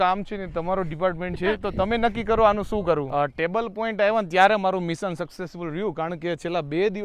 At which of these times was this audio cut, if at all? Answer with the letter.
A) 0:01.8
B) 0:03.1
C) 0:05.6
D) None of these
B